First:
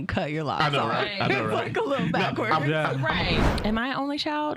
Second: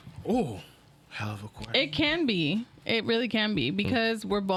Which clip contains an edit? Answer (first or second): first